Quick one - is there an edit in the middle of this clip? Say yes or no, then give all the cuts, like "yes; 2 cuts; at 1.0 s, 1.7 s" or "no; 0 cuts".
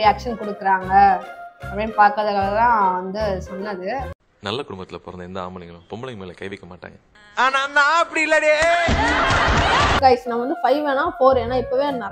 no; 0 cuts